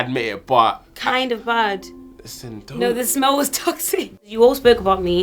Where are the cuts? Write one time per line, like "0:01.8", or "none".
0:04.3